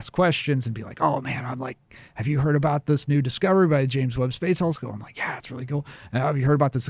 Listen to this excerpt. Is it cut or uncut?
uncut